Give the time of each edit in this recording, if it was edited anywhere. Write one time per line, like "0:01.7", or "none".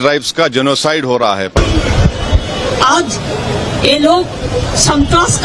0:01.6